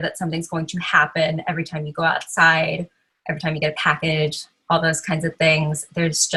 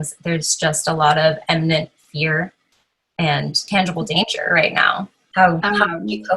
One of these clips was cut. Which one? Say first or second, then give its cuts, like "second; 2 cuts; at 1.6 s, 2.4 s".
second; 2 cuts; at 3.6 s, 5.2 s